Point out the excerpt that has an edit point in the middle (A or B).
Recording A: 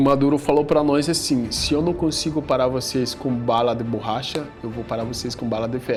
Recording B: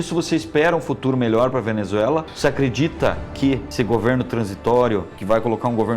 B